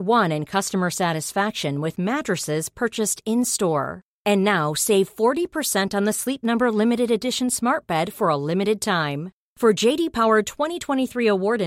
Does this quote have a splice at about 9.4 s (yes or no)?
no